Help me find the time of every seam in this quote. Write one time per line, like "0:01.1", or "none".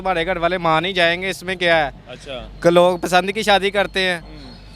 none